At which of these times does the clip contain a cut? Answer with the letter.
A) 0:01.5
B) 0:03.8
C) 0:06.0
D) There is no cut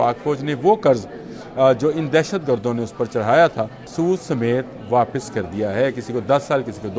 B